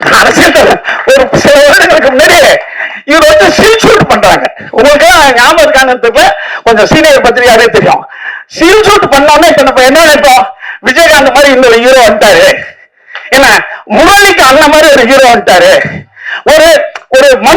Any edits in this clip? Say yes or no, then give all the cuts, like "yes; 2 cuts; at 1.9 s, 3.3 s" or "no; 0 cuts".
no; 0 cuts